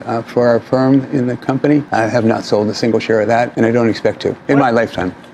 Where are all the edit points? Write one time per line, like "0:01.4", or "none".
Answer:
0:01.9
0:03.5
0:04.4

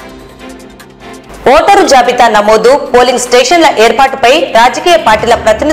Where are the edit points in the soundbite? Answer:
0:01.2

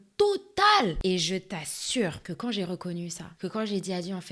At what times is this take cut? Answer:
0:01.0
0:02.2
0:03.2

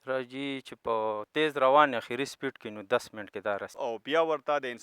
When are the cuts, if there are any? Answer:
0:03.7

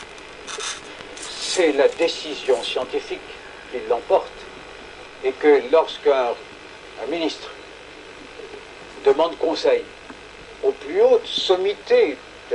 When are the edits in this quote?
none

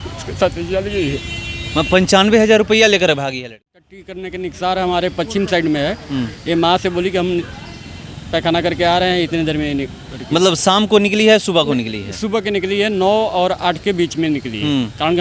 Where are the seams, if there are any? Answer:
0:03.9

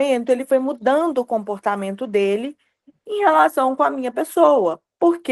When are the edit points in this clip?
none

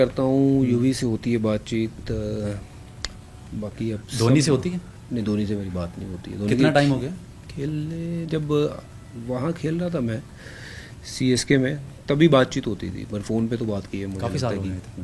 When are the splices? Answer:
none

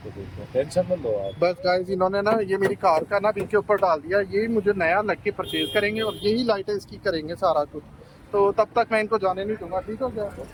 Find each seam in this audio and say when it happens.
none

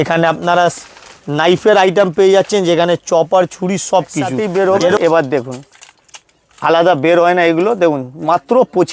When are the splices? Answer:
0:04.4

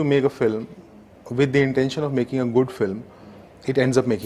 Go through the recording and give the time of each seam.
none

